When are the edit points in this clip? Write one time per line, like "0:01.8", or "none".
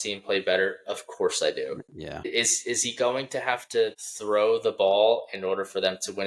0:02.3
0:04.1